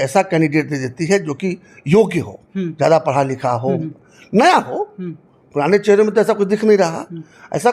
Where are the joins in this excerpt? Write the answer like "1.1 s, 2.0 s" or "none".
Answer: none